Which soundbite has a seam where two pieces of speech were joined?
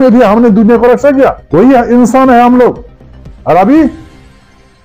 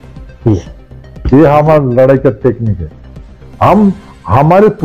first; 1 cut; at 1.4 s

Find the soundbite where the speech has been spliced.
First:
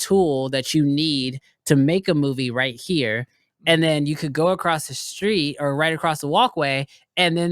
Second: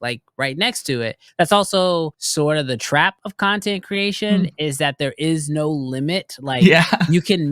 second; 1 cut; at 1.2 s

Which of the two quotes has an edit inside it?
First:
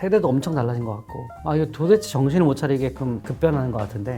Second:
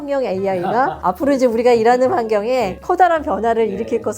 second; 2 cuts; at 1.0 s, 2.8 s

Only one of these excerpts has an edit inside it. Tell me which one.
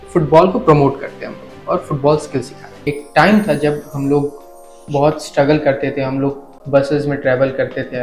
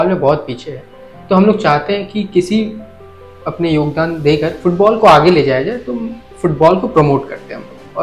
first; 2 cuts; at 2.9 s, 6.5 s

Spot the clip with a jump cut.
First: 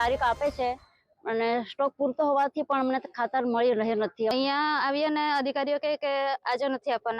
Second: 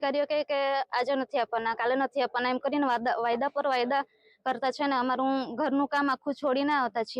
first; 1 cut; at 4.3 s

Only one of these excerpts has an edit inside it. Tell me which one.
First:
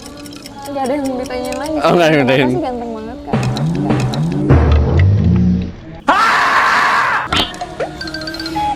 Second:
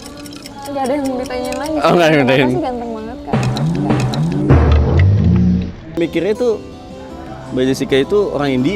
second; 1 cut; at 6.0 s

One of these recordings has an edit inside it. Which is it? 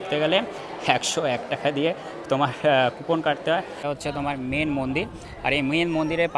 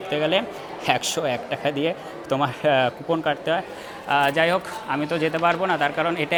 first; 1 cut; at 3.8 s

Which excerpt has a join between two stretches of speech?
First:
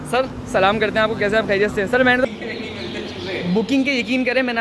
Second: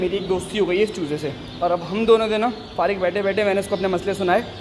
first; 1 cut; at 2.2 s

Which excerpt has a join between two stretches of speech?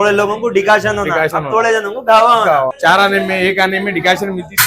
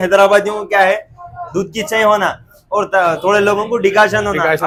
first; 1 cut; at 2.7 s

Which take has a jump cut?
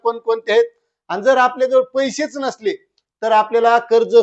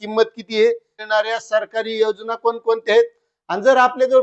second; 1 cut; at 1.0 s

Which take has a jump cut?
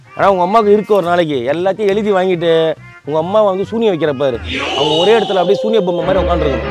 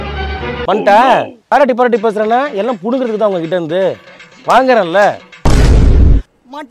second; 1 cut; at 1.5 s

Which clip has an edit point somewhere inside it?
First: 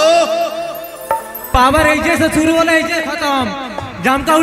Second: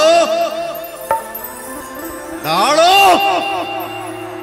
first; 1 cut; at 1.5 s

